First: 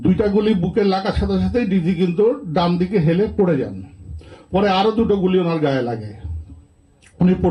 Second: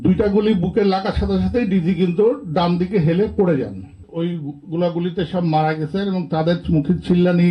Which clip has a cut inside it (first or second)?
second